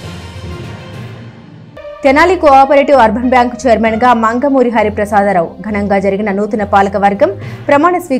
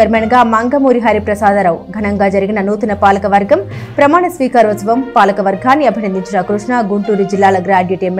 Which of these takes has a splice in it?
first; 1 cut; at 2.0 s

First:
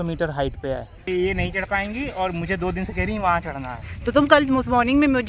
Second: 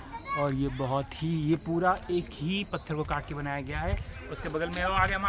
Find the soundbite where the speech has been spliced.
first; 1 cut; at 1.0 s

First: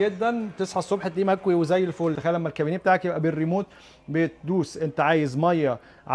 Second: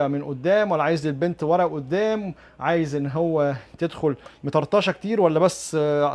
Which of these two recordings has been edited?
first; 1 cut; at 2.2 s

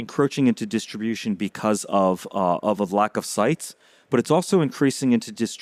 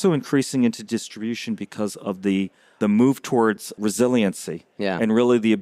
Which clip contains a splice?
second; 2 cuts; at 2.8 s, 3.8 s

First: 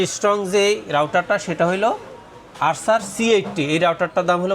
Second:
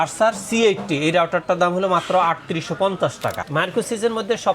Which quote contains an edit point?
second; 1 cut; at 3.4 s

